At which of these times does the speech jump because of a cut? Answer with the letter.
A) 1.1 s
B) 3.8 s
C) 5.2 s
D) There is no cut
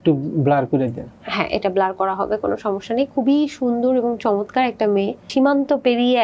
C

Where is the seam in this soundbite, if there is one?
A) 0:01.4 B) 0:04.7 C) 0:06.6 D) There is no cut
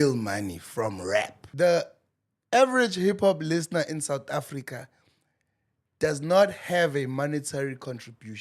A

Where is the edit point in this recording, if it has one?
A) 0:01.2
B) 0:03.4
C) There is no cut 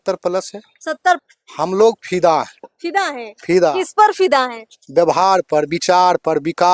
A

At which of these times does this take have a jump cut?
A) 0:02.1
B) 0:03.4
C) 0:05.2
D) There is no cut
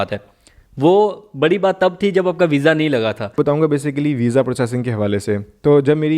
B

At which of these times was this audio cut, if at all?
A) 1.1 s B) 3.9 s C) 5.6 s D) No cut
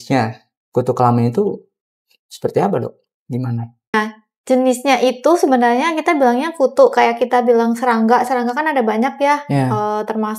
B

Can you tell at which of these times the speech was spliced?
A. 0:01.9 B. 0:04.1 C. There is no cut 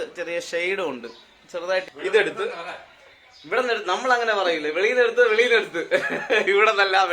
A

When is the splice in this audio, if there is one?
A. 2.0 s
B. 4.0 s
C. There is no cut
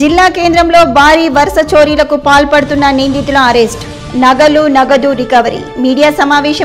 C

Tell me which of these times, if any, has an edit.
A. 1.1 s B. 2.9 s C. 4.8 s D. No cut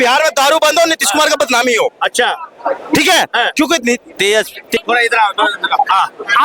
C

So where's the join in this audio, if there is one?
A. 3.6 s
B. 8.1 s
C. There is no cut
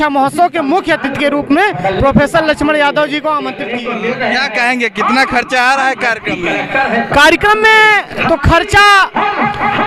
A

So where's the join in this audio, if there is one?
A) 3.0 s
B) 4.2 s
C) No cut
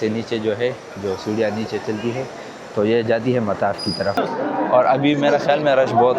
B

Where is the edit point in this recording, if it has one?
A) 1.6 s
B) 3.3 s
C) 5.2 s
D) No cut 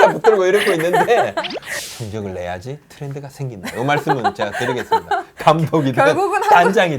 A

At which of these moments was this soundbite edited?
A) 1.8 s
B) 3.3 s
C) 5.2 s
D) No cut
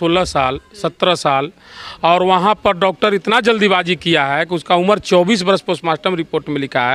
D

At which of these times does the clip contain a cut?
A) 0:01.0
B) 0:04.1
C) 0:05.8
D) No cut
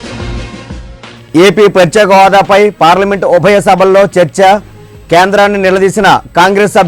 A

